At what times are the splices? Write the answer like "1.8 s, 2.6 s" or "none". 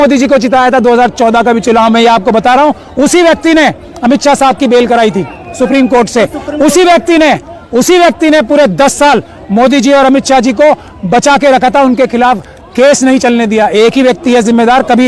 none